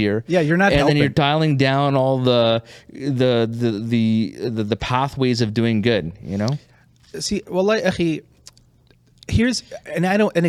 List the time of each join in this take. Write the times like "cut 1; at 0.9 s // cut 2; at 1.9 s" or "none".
none